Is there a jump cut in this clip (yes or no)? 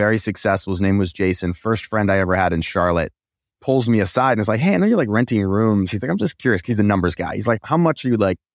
yes